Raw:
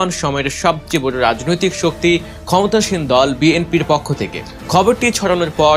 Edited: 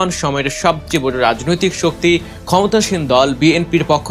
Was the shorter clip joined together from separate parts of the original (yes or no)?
no